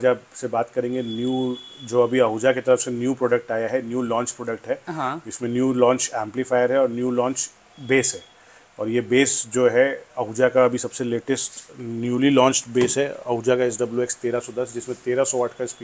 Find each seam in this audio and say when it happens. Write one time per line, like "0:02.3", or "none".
none